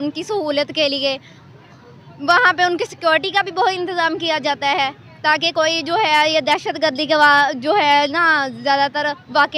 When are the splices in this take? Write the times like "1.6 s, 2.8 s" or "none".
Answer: none

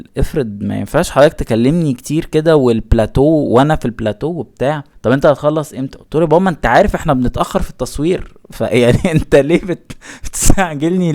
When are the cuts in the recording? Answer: none

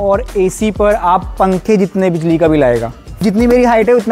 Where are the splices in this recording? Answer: 3.1 s

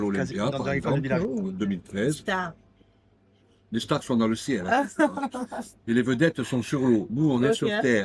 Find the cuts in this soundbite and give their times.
none

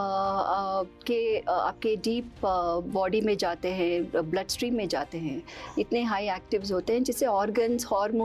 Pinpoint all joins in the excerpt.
none

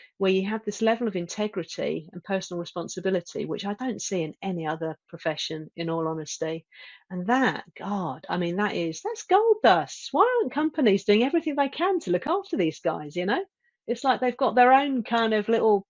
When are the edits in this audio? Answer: none

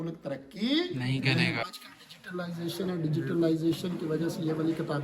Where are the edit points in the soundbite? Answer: 1.6 s

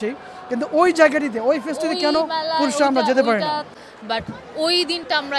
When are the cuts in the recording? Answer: 3.7 s

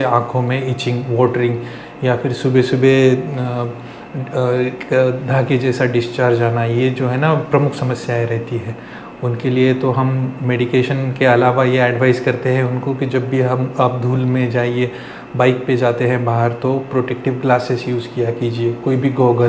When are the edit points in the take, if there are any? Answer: none

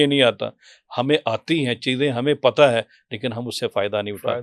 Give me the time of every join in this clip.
none

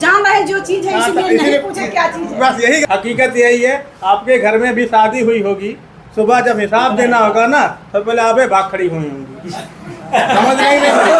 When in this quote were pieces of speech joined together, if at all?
2.8 s

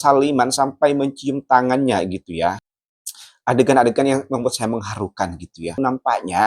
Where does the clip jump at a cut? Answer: 2.6 s, 5.8 s

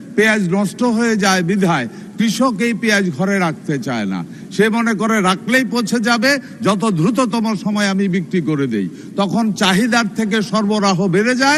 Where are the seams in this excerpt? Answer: none

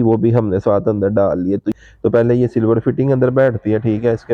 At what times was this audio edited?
1.7 s

